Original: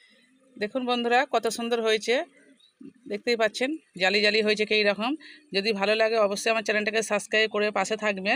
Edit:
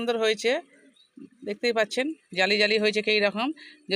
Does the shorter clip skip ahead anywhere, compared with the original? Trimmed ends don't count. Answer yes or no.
no